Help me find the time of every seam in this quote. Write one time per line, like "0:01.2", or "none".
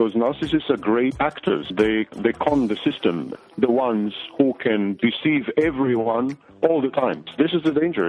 0:02.0
0:03.3